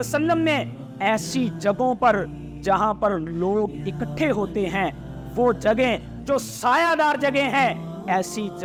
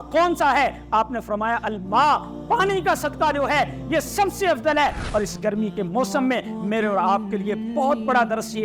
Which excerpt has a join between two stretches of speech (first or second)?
second